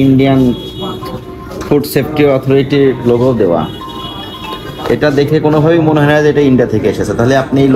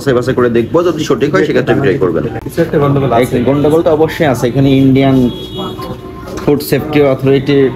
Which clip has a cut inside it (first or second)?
second